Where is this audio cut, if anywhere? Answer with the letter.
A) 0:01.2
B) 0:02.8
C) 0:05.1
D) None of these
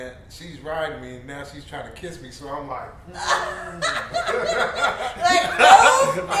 D